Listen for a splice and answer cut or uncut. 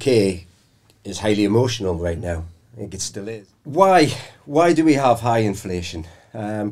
cut